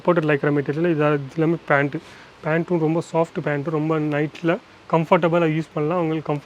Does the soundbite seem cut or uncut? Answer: uncut